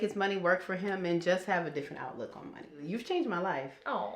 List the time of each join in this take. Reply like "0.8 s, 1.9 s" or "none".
2.8 s